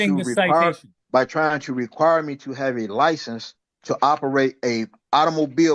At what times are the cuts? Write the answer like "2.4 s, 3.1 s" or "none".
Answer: 0.9 s